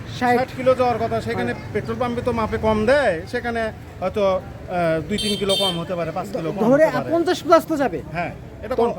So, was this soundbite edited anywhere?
no; 0 cuts

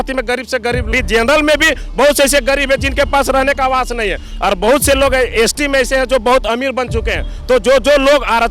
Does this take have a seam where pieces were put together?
yes; 1 cut; at 0.9 s

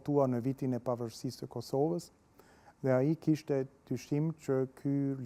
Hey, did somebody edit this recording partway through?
no; 0 cuts

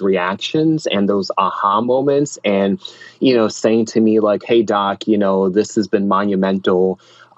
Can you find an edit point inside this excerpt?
no; 0 cuts

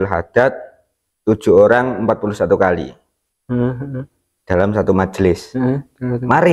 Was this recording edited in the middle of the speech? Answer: no; 0 cuts

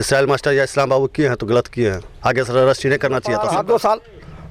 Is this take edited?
yes; 1 cut; at 3.4 s

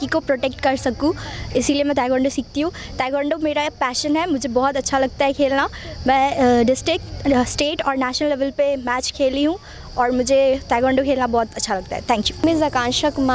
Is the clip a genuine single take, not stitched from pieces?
yes; 0 cuts

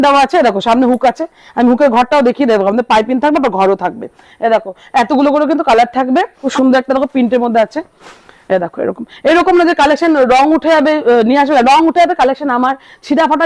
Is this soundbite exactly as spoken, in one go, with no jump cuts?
no; 1 cut; at 6.4 s

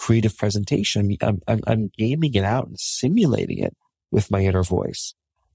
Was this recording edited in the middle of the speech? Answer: no; 0 cuts

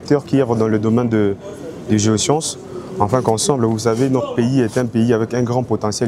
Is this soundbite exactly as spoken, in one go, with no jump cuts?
yes; 0 cuts

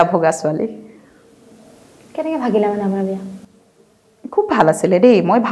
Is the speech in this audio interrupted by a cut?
no; 0 cuts

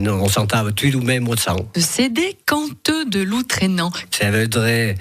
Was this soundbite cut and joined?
yes; 2 cuts; at 1.7 s, 4.0 s

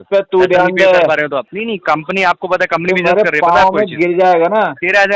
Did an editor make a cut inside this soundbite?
yes; 1 cut; at 1.5 s

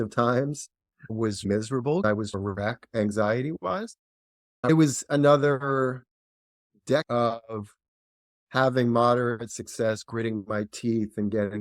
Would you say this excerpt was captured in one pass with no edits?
no; 2 cuts; at 2.0 s, 4.7 s

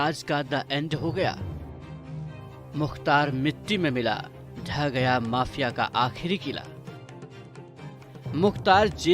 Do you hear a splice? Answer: yes; 2 cuts; at 1.4 s, 2.7 s

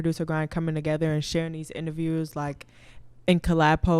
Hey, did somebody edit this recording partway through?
no; 0 cuts

